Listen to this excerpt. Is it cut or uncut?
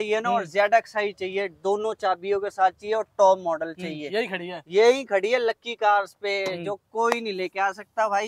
uncut